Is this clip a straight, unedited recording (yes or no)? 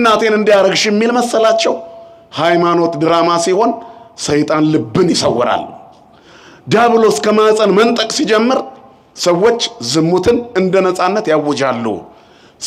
yes